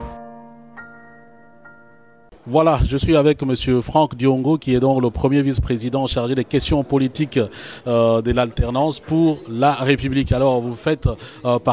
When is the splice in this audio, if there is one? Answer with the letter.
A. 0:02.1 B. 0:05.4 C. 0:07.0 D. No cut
A